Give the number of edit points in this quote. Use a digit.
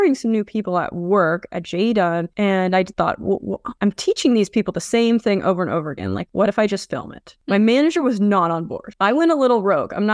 0